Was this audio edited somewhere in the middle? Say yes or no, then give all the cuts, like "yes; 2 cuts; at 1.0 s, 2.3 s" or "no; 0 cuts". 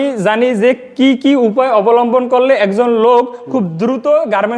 no; 0 cuts